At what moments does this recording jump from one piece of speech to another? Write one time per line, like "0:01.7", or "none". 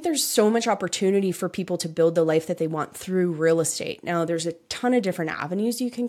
none